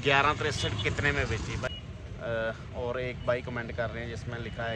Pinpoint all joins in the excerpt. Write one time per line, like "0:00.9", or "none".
0:01.7